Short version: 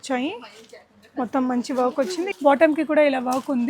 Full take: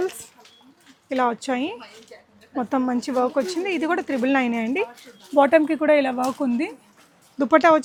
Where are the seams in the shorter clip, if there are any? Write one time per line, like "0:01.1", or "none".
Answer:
0:02.3